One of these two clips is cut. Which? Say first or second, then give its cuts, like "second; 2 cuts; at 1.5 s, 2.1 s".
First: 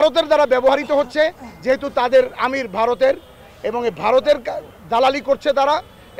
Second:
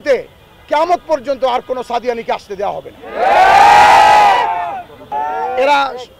second; 1 cut; at 5.1 s